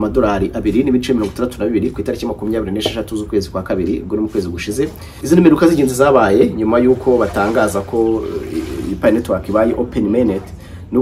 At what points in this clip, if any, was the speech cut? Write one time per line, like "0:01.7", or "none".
0:05.2